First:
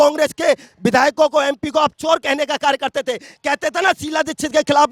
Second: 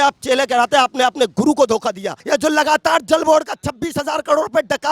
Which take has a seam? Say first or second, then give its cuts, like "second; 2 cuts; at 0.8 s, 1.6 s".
second; 1 cut; at 2.2 s